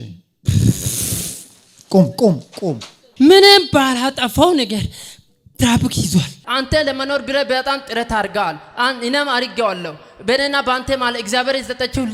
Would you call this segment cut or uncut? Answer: cut